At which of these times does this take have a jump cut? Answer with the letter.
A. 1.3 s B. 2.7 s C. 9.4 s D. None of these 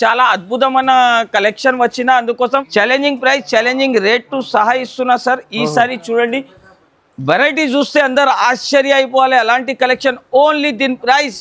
B